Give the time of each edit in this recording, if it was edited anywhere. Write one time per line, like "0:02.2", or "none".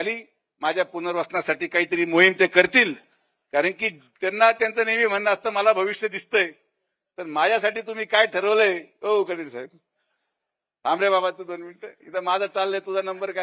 none

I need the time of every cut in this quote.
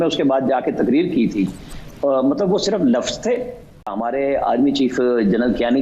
0:03.9

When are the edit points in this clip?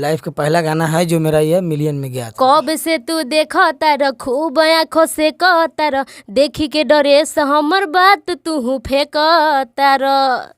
0:02.2

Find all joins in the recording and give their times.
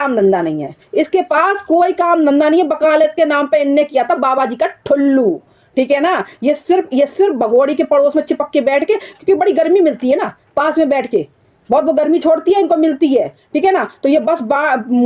none

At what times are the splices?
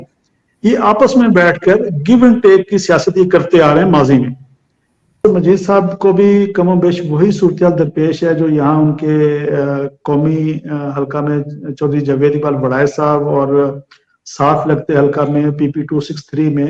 0:05.2

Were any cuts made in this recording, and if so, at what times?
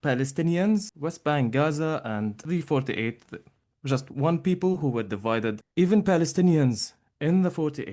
0:00.9
0:02.4
0:05.6

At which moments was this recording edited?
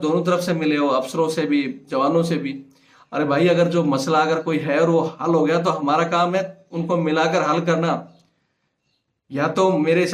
none

